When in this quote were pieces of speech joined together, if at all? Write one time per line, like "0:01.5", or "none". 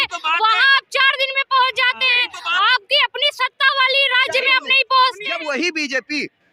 0:05.3